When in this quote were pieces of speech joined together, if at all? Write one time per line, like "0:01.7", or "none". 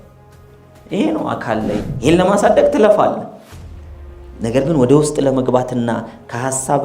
0:01.9